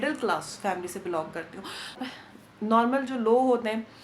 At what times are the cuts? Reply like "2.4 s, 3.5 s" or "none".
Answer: 2.0 s